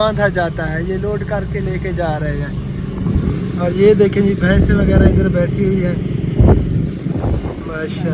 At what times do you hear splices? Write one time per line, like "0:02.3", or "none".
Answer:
none